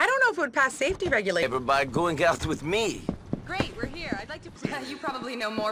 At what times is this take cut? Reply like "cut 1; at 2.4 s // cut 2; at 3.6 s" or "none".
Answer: cut 1; at 1.4 s // cut 2; at 4.5 s